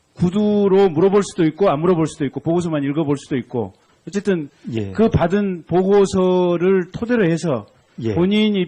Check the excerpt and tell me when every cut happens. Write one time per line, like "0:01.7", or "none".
0:06.6